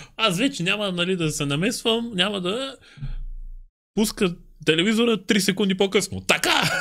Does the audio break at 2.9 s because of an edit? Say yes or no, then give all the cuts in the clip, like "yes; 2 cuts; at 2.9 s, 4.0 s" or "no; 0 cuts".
no; 0 cuts